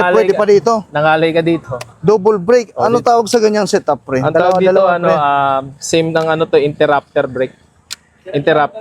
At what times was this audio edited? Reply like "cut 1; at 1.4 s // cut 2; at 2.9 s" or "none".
none